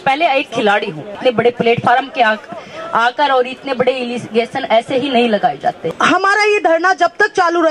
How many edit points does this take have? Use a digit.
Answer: 2